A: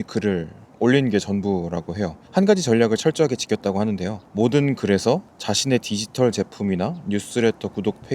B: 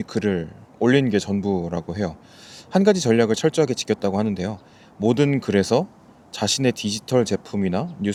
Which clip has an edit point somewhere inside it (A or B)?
A